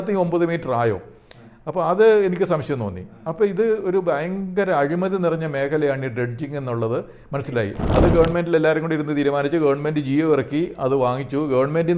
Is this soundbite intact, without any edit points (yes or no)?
no